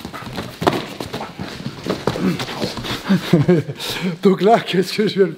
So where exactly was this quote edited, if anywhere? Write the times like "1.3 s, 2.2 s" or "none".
none

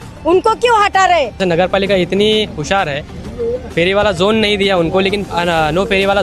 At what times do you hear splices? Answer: 1.4 s

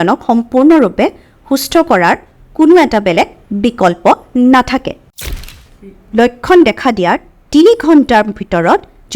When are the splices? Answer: 5.3 s

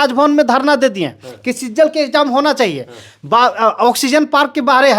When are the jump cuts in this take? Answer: none

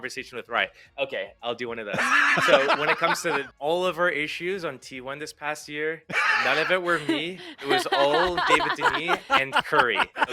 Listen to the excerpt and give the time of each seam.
3.5 s

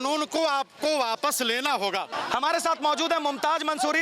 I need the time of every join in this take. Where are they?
2.1 s

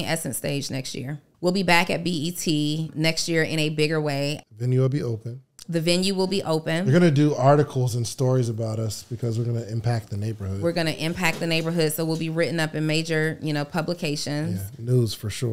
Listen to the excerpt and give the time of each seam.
1.2 s, 2.9 s, 4.4 s

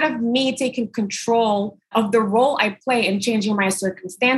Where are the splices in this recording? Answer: none

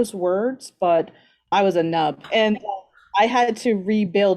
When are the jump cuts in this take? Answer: 1.5 s, 2.2 s

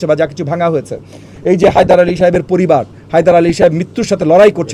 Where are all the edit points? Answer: none

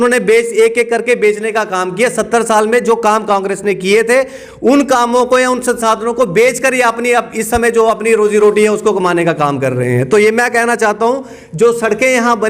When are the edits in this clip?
none

